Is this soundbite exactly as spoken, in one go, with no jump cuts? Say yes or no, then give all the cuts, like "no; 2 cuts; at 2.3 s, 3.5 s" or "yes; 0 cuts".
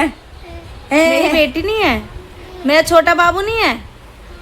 no; 1 cut; at 1.3 s